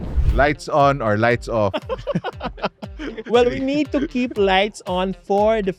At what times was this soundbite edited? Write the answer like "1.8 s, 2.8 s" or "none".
none